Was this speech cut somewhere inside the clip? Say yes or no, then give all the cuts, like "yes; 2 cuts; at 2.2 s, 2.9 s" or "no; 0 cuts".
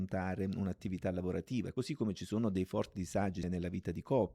yes; 2 cuts; at 1.7 s, 3.4 s